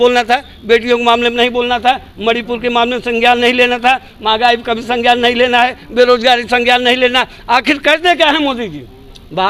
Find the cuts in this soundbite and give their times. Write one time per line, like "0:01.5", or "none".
none